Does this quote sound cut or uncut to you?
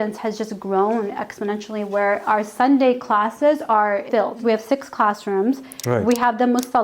uncut